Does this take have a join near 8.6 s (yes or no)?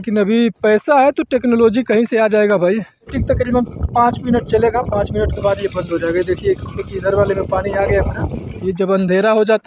yes